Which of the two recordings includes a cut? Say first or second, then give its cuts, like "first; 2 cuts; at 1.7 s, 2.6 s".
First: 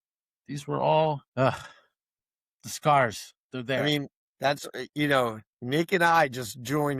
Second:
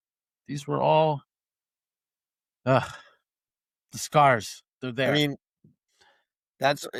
first; 2 cuts; at 1.3 s, 4.2 s